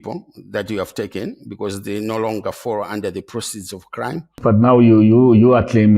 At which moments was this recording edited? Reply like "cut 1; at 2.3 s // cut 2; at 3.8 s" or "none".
cut 1; at 4.3 s